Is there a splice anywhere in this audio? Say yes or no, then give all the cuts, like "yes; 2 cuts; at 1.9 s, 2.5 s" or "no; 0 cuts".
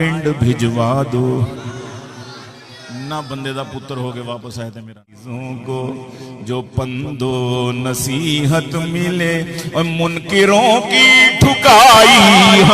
yes; 1 cut; at 5.1 s